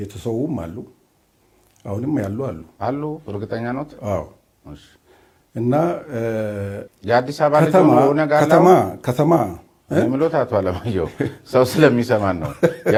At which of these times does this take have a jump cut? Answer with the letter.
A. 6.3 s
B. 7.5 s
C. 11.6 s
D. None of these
D